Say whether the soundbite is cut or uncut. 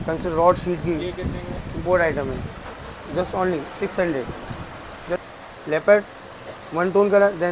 cut